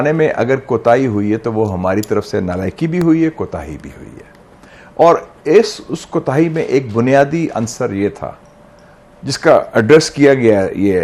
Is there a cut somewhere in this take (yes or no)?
no